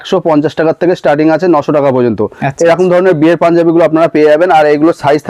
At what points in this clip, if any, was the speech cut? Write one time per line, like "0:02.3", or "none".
none